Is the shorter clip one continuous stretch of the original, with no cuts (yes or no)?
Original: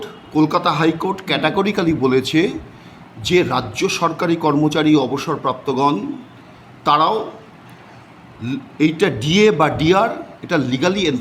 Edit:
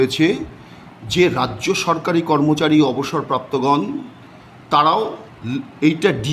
no